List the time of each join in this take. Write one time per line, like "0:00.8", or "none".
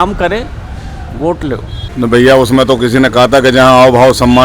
0:01.8

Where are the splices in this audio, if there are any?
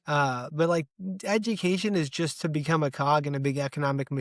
none

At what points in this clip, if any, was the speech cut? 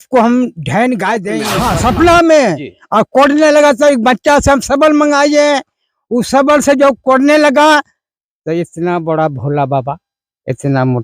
0:01.4

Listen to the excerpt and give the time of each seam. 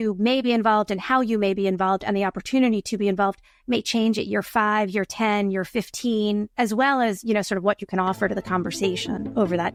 none

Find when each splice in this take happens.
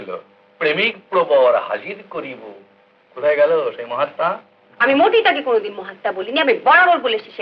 none

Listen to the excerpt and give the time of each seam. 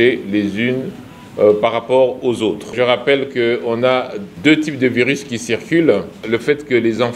0:02.7
0:04.2
0:06.1

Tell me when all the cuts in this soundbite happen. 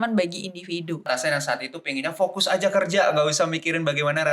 0:01.1

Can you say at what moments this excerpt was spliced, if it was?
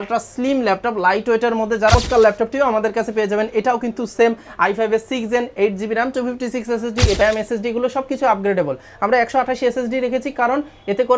0:01.9
0:07.2

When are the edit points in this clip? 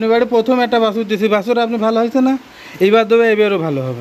none

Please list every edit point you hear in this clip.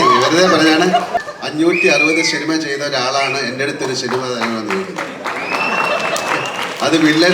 0:01.2

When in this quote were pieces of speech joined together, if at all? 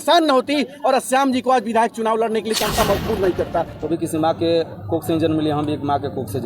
0:03.7

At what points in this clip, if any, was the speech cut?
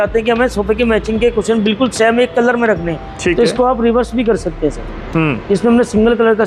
none

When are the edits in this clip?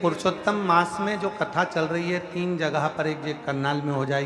none

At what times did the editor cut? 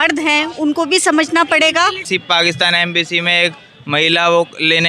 0:02.0

